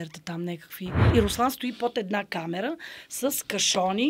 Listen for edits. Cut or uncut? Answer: cut